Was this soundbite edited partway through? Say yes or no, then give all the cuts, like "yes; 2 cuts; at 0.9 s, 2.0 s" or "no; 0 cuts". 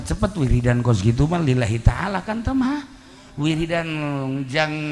no; 0 cuts